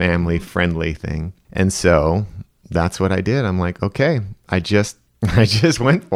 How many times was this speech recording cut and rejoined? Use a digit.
2